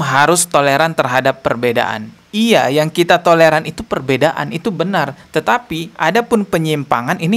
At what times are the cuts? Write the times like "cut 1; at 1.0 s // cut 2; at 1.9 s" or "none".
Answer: none